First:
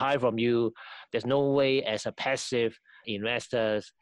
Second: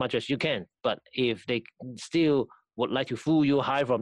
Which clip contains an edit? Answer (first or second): first